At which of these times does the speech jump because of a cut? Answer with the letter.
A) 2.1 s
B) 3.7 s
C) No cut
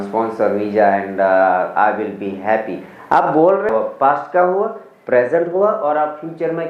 B